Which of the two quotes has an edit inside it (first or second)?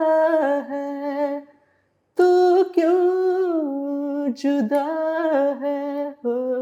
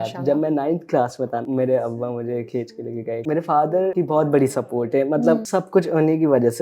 second